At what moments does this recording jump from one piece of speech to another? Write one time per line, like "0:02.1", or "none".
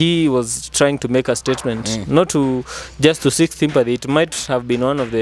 none